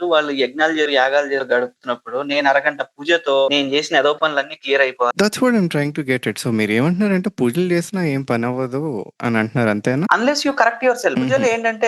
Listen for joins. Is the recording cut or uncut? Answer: uncut